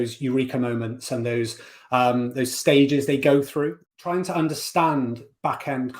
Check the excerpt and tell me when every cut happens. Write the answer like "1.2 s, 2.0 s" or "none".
3.8 s